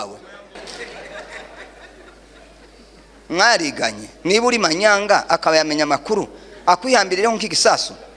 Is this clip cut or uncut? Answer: uncut